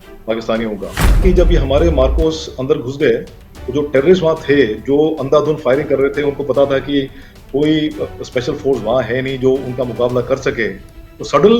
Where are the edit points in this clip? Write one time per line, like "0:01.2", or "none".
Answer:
0:01.2